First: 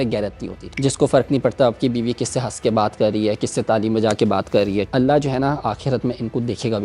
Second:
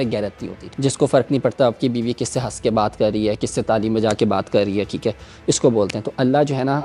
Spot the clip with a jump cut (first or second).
first